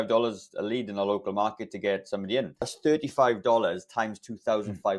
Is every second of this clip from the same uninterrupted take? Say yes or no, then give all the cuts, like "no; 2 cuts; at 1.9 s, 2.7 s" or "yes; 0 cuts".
no; 1 cut; at 2.6 s